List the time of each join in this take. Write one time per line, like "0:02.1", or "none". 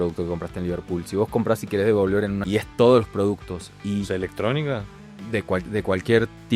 0:02.4